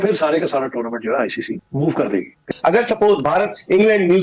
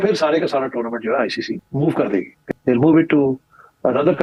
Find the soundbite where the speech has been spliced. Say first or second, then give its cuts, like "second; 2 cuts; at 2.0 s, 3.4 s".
first; 1 cut; at 2.5 s